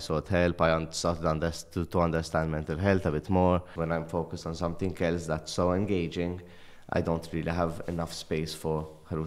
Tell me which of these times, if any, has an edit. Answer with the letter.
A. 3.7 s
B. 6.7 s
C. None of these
A